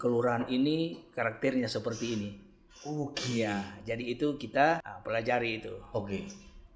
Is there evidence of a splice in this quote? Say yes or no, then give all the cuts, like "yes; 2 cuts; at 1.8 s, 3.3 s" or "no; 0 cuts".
yes; 1 cut; at 4.9 s